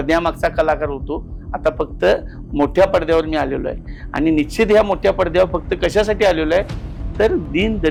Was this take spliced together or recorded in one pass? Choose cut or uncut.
uncut